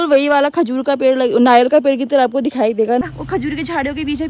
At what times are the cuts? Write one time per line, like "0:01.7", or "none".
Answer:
0:03.0